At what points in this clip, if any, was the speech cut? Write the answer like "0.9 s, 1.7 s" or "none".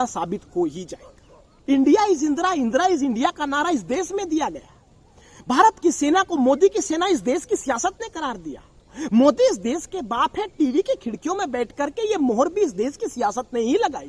1.7 s